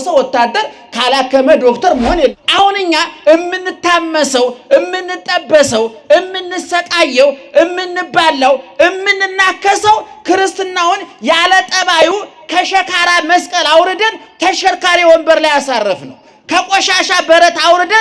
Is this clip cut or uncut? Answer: cut